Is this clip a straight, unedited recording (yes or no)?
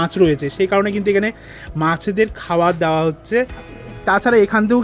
no